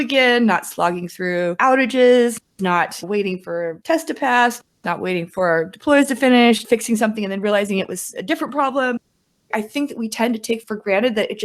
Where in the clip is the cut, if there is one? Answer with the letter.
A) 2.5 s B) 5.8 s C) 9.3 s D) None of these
C